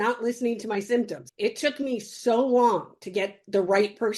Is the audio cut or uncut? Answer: cut